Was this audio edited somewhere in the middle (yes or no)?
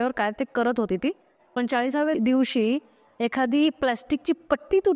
yes